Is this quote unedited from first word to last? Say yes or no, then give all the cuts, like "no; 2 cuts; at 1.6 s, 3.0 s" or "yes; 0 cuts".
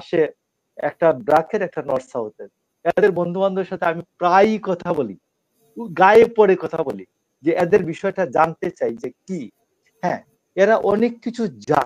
yes; 0 cuts